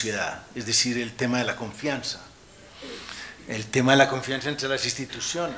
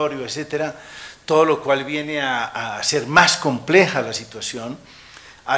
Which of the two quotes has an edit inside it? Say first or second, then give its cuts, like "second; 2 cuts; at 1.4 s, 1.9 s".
first; 1 cut; at 1.6 s